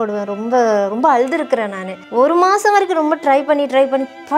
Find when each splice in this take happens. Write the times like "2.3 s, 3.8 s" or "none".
2.0 s

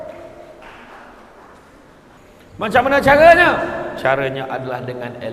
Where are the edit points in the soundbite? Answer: 2.2 s

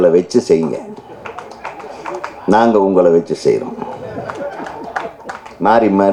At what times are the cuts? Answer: none

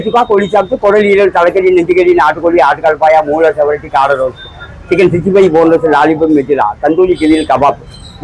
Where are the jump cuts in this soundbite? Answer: none

